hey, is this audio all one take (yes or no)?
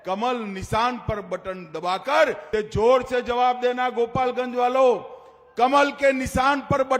no